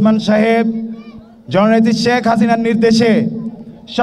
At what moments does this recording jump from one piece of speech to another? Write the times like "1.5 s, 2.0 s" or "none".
none

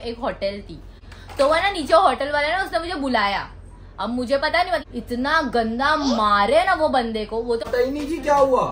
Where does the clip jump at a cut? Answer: 1.1 s, 4.8 s, 7.6 s

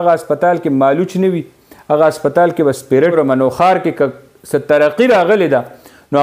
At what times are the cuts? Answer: 3.1 s

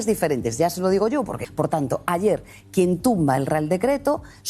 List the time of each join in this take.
1.4 s

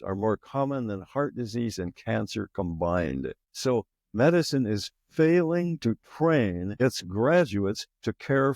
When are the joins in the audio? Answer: 3.4 s, 6.7 s

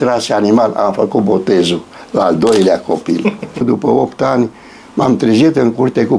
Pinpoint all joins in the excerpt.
3.6 s

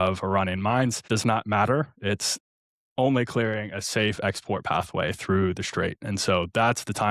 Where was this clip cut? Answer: 1.0 s

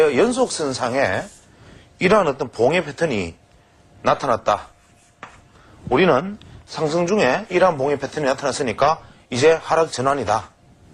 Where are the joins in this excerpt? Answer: none

